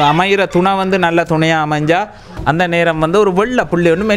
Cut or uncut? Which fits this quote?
cut